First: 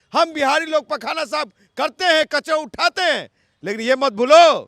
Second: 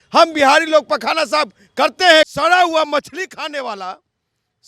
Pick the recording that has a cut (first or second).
second